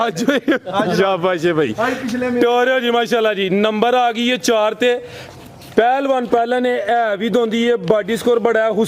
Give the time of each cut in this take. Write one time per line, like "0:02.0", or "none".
none